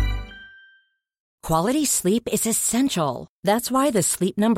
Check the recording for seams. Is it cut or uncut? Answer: cut